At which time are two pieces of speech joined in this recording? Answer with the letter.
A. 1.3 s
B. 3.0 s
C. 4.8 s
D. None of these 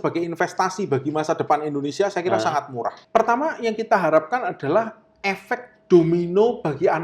B